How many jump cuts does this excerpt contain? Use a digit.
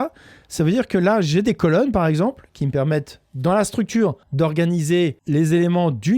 2